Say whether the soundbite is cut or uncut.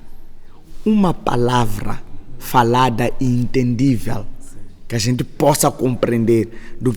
uncut